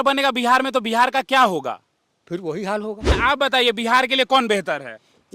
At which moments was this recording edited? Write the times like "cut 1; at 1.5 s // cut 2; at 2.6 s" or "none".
cut 1; at 3.1 s